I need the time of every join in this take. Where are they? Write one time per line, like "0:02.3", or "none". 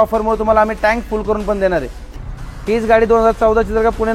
0:02.1